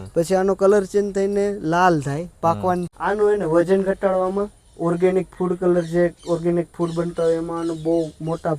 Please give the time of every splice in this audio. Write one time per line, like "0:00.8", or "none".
0:02.9